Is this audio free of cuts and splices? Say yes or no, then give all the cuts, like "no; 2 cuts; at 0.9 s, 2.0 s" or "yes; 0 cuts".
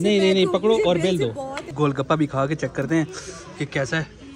no; 1 cut; at 1.6 s